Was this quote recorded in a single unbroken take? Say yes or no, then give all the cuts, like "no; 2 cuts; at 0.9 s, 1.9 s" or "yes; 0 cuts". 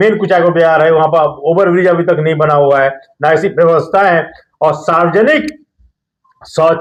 yes; 0 cuts